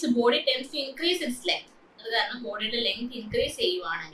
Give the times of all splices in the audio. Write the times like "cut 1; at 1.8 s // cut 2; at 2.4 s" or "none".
none